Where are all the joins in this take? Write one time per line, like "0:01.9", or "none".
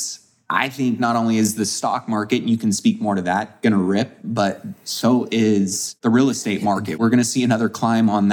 0:05.8
0:06.9